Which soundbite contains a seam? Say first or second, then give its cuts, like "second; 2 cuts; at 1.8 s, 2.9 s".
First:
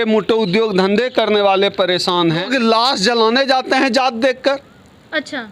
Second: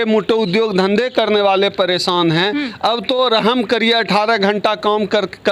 first; 1 cut; at 2.5 s